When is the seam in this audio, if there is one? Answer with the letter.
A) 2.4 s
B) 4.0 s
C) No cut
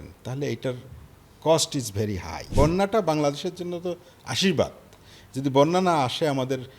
A